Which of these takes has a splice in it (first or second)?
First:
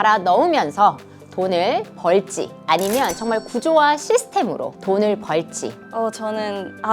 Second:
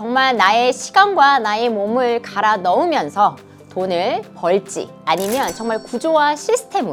first